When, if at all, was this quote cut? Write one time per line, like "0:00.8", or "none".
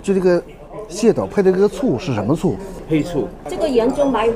0:03.4

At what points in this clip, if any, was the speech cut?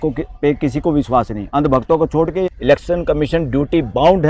0:02.5

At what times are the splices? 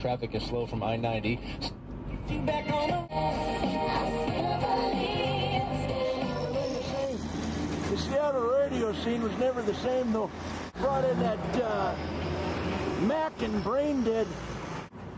0:02.8

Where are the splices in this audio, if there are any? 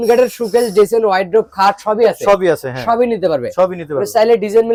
none

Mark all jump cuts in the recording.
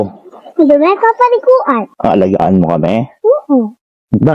0:01.9

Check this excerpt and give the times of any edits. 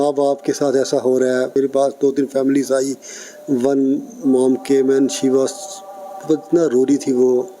0:01.6

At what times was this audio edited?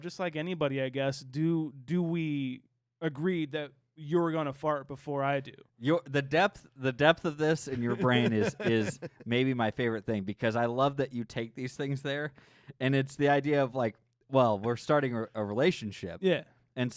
none

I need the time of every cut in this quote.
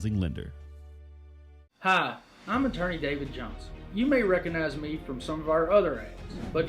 0:01.7

